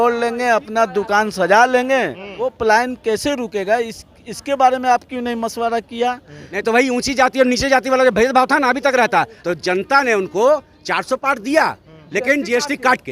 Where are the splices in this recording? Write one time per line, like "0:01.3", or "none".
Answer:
0:02.5
0:06.4
0:09.4